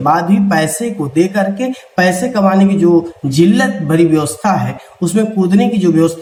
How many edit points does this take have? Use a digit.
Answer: 0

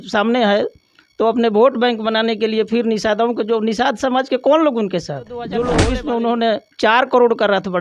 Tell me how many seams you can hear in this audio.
1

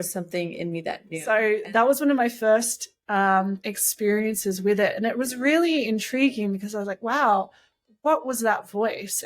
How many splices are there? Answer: 1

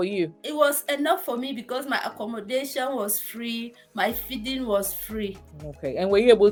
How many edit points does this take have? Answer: 0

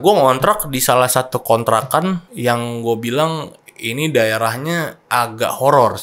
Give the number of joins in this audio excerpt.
2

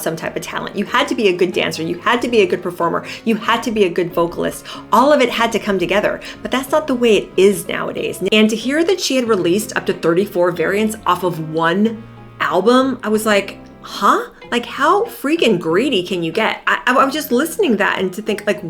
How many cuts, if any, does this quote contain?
1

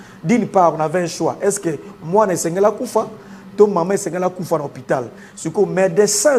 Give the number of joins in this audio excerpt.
0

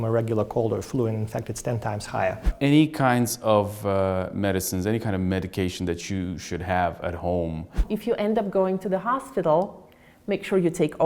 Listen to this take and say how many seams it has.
2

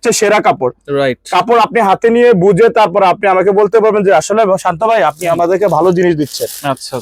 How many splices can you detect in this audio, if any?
0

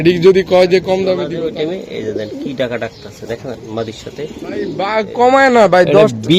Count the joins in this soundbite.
2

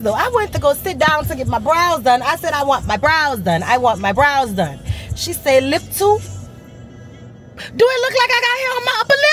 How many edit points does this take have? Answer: 0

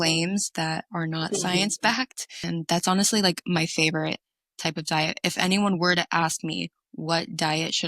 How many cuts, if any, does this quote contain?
1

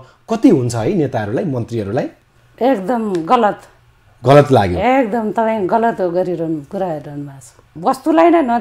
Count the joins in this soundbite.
1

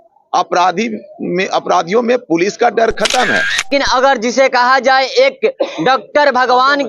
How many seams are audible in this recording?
1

